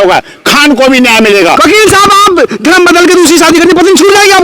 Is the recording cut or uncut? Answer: cut